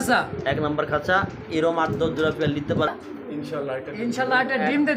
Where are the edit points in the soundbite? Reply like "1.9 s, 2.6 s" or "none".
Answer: 2.9 s